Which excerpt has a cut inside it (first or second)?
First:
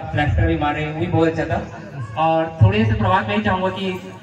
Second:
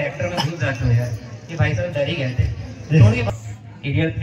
second